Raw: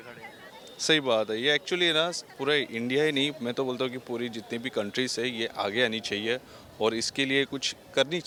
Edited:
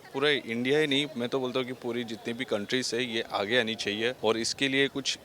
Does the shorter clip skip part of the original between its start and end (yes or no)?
yes